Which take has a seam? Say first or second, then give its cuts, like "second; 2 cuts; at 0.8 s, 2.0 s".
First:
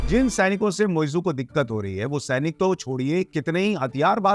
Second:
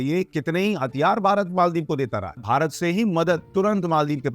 second; 1 cut; at 2.3 s